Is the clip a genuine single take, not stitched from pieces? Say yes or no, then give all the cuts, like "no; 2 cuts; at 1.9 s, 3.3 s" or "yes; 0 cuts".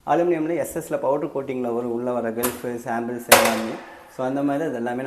yes; 0 cuts